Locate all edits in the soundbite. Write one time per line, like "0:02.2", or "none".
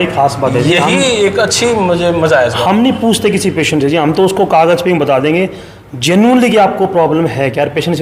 none